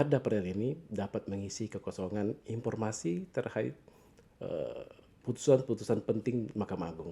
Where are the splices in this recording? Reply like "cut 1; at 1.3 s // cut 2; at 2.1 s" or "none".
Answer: none